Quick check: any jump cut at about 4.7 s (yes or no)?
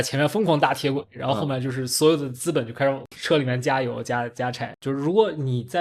yes